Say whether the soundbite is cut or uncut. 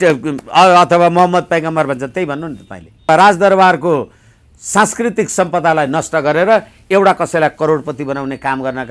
cut